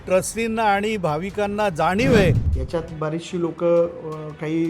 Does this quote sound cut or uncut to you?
cut